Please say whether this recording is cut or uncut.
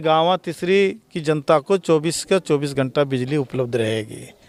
uncut